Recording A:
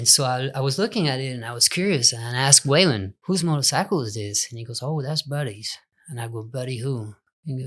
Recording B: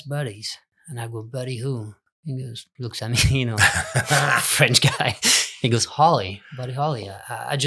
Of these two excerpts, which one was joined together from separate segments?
A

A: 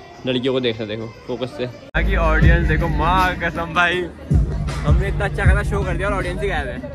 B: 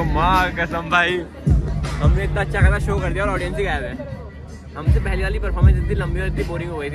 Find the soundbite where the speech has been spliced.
A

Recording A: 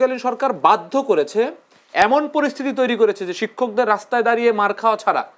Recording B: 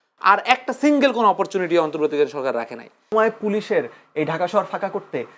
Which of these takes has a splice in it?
B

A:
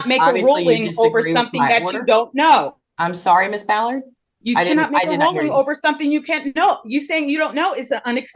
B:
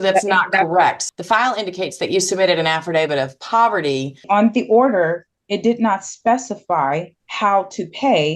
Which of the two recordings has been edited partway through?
B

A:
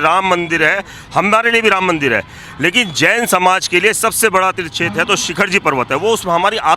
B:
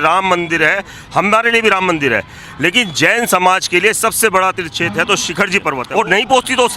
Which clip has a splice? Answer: B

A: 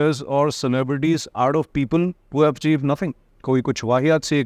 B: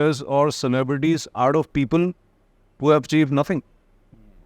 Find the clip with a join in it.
A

